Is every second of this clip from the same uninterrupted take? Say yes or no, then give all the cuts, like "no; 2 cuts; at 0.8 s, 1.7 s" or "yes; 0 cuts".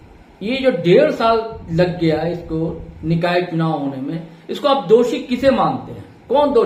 yes; 0 cuts